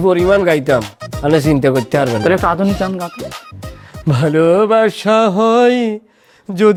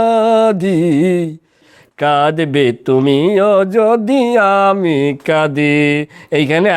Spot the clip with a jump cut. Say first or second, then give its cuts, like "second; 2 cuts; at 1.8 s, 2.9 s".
second; 1 cut; at 1.7 s